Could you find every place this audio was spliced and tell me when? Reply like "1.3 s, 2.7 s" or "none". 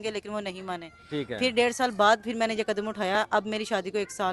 none